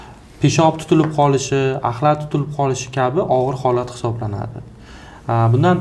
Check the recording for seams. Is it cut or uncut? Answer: uncut